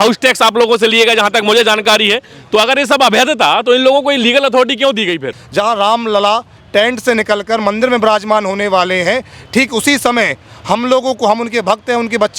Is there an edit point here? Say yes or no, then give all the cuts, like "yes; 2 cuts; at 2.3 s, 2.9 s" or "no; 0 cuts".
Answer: yes; 1 cut; at 5.3 s